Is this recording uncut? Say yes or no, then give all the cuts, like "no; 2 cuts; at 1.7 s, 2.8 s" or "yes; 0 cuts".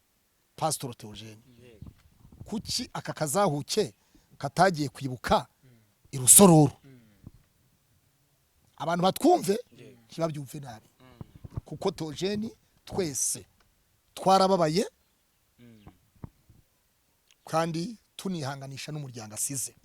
yes; 0 cuts